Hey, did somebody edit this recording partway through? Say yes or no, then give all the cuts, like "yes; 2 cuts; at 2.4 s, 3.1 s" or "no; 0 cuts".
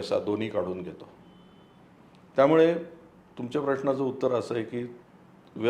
no; 0 cuts